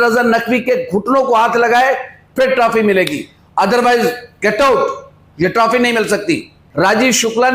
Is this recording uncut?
no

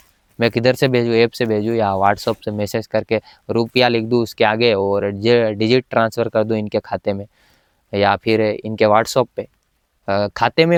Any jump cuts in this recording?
no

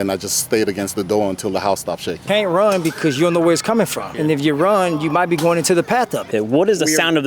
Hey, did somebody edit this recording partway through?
yes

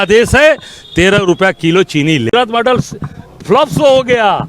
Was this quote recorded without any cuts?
no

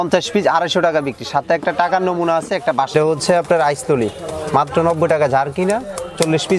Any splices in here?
yes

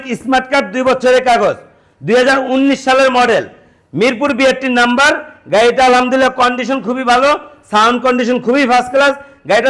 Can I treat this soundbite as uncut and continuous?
yes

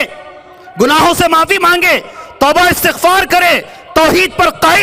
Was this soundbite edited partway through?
no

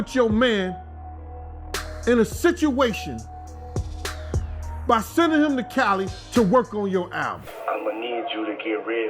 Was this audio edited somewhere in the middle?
yes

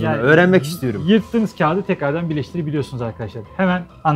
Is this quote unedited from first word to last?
yes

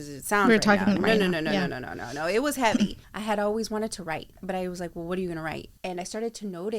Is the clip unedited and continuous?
no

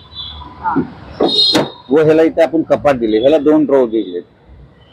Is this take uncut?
yes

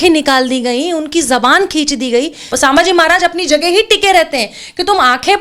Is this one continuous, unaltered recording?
no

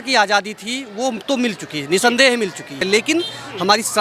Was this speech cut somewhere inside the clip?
yes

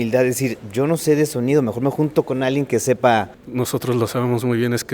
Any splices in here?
yes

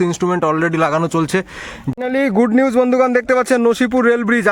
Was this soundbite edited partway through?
yes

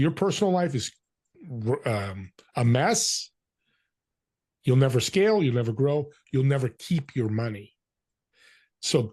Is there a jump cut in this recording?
no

